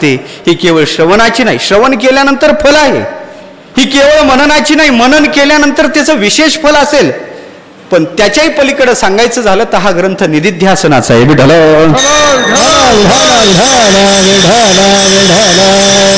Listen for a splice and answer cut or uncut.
uncut